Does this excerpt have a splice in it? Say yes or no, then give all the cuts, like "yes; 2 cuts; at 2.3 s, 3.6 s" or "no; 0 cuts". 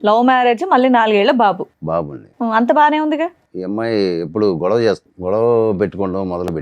yes; 2 cuts; at 3.5 s, 5.1 s